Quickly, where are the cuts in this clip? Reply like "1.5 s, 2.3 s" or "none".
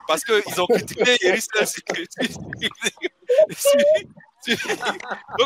none